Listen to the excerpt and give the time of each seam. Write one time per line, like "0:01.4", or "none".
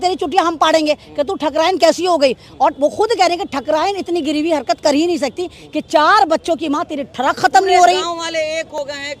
none